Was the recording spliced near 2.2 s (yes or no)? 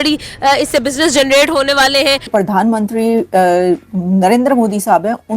yes